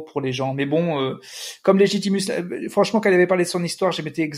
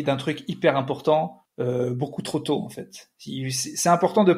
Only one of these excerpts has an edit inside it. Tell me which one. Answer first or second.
second